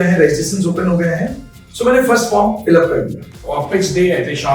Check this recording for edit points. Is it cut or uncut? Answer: cut